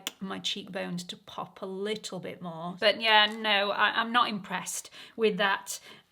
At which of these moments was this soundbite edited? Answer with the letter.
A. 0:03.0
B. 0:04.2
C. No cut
A